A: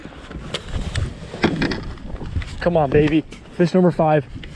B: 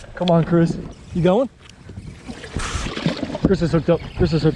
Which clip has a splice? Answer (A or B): B